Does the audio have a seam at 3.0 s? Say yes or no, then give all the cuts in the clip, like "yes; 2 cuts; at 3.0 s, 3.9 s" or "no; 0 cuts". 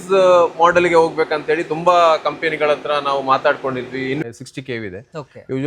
no; 1 cut; at 4.2 s